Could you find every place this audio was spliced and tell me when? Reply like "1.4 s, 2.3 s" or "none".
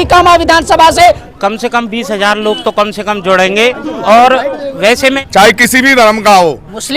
1.2 s, 5.2 s